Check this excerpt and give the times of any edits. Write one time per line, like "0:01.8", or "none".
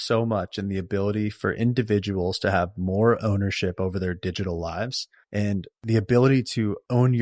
none